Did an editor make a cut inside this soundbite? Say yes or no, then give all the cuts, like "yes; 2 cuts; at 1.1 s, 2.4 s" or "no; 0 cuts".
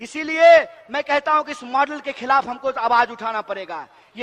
no; 0 cuts